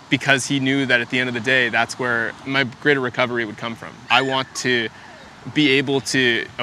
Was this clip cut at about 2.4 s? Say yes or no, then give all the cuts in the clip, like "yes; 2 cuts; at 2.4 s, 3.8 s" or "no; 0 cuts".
yes; 2 cuts; at 2.4 s, 3.9 s